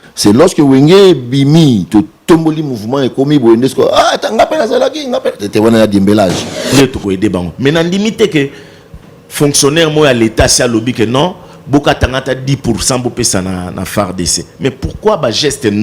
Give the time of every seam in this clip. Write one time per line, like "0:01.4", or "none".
0:06.7